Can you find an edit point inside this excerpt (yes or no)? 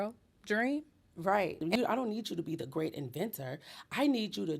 yes